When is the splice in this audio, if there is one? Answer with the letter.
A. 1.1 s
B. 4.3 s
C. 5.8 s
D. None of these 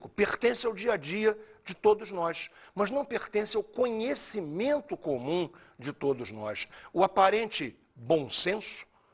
B